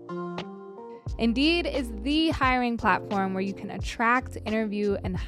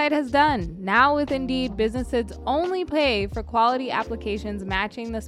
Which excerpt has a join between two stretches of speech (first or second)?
first